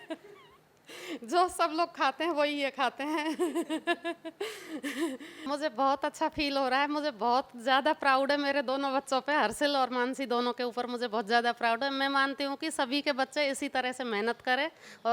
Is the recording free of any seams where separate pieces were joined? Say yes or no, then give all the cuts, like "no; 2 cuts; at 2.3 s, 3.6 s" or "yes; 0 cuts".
no; 1 cut; at 5.4 s